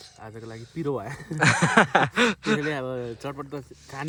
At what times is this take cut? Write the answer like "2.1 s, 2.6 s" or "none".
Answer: none